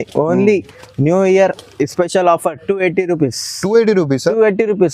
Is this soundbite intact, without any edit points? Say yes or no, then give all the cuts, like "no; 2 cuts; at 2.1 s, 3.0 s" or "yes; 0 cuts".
yes; 0 cuts